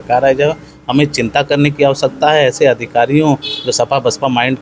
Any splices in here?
no; 0 cuts

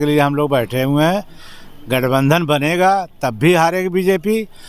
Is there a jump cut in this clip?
no; 0 cuts

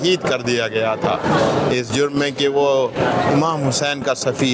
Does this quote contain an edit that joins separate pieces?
no; 0 cuts

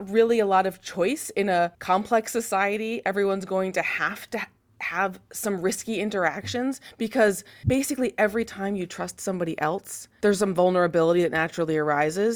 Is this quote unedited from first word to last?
no; 3 cuts; at 1.8 s, 7.5 s, 10.0 s

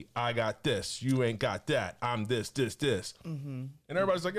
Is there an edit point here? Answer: no; 0 cuts

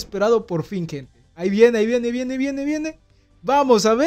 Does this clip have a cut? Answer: no; 0 cuts

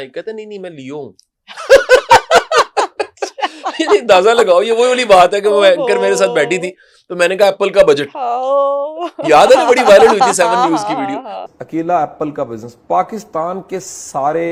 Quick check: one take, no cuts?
yes; 0 cuts

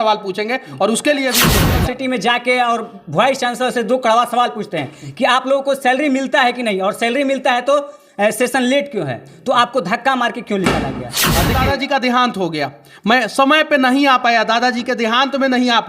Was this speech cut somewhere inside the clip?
yes; 2 cuts; at 1.7 s, 11.5 s

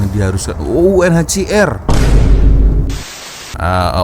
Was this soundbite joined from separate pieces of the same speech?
yes; 1 cut; at 2.9 s

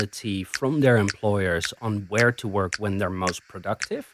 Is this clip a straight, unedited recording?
yes; 0 cuts

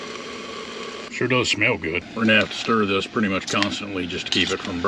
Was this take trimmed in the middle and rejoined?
yes; 2 cuts; at 1.1 s, 2.1 s

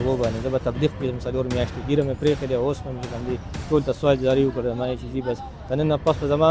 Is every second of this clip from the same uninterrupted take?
yes; 0 cuts

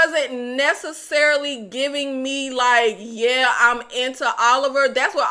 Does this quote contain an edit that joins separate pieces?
no; 0 cuts

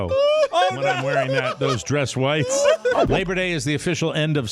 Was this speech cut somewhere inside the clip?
yes; 1 cut; at 3.1 s

